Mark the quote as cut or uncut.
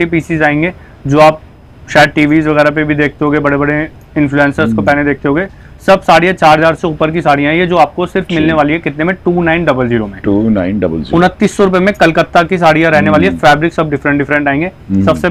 uncut